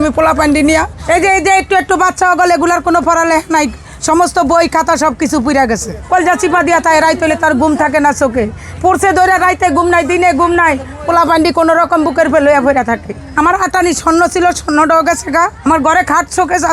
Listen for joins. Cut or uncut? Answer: cut